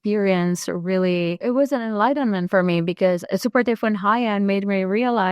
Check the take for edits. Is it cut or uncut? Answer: cut